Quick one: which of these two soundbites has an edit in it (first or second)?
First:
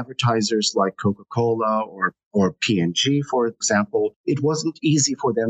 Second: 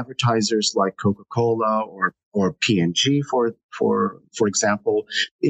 first